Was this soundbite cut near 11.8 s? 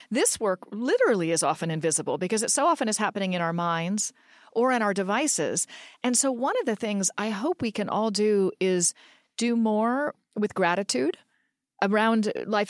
yes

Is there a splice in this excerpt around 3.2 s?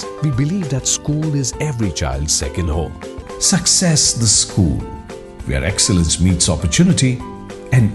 yes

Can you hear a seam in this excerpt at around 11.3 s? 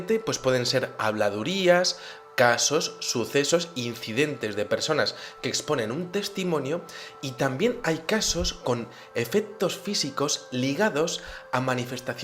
no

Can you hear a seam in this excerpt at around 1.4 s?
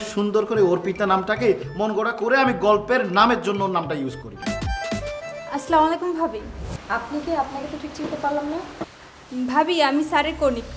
no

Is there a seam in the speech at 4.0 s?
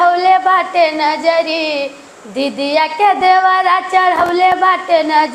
no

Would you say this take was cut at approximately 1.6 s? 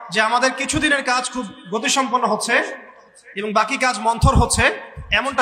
no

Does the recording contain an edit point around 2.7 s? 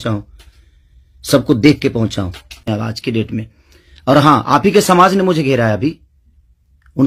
yes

